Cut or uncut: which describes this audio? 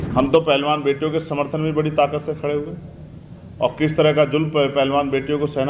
uncut